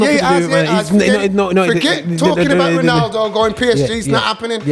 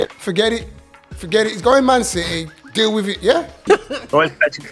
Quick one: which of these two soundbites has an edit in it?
second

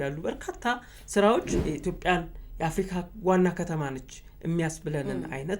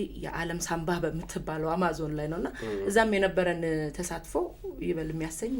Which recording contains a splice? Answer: first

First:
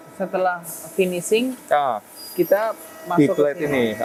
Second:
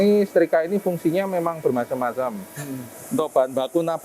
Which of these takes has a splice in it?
second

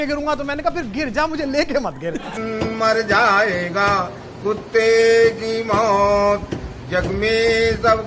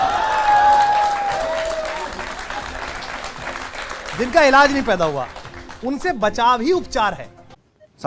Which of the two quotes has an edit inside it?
first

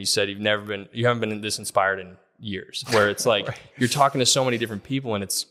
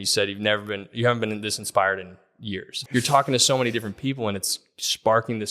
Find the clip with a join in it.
second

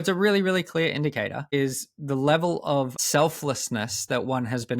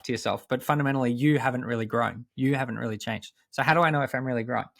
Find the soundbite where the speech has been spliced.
first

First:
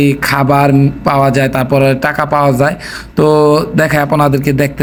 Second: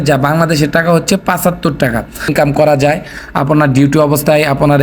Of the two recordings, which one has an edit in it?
second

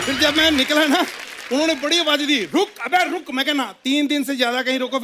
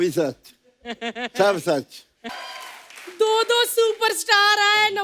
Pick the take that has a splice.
second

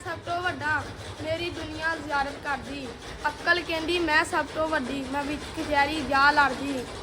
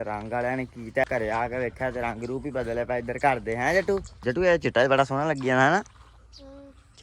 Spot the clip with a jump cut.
second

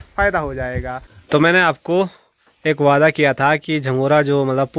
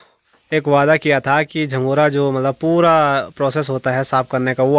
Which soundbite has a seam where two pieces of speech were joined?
first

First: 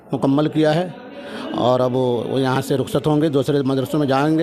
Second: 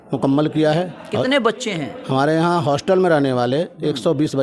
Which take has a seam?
second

